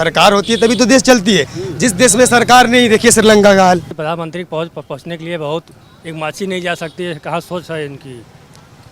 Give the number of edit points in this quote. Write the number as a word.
one